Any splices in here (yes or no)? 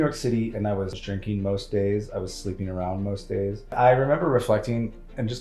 yes